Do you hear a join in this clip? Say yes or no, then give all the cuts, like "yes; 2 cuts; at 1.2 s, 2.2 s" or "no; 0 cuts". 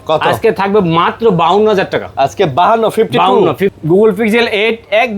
yes; 1 cut; at 3.8 s